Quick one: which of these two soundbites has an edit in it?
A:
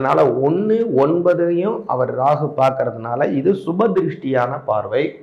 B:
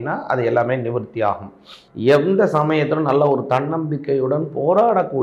B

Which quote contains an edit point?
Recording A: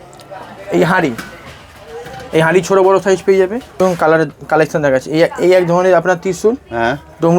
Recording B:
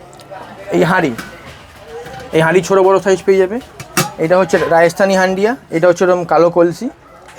A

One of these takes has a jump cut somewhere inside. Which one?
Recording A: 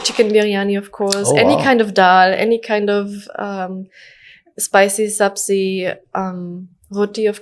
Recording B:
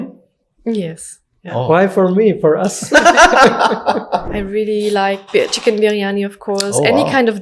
B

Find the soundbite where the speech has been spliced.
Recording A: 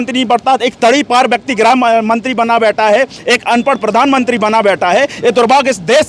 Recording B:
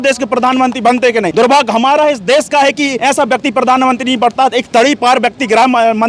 B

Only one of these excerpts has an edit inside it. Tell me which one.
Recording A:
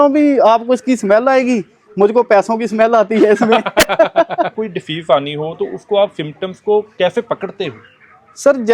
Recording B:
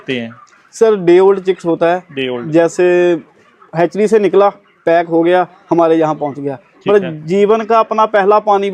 A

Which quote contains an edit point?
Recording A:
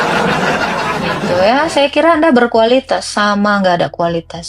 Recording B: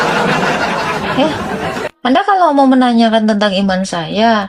A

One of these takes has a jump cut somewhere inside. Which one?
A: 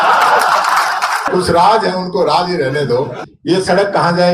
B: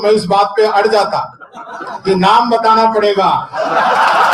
A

